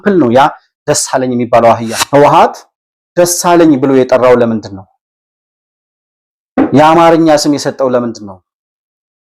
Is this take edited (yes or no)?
yes